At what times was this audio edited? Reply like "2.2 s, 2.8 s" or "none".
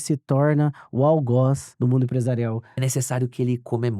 1.7 s, 2.8 s